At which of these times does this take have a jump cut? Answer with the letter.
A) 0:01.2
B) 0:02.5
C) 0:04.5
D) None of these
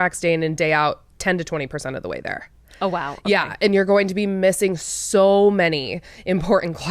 D